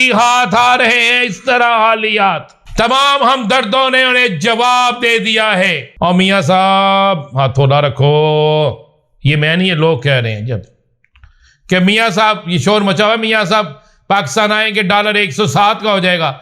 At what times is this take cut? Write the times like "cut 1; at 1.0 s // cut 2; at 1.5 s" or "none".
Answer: cut 1; at 2.6 s // cut 2; at 5.8 s